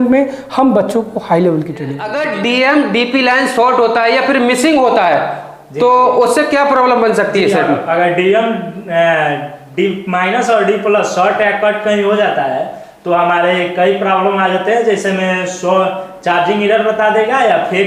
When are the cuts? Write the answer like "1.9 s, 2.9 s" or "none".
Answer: 2.1 s